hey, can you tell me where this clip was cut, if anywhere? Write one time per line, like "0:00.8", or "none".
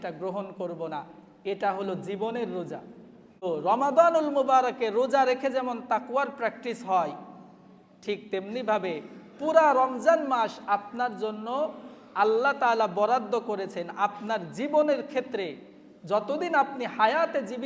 0:03.4